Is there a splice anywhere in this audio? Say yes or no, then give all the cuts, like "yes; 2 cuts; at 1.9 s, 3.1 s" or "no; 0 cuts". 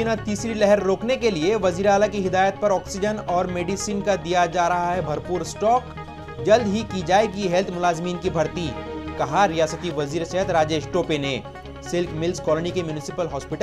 no; 0 cuts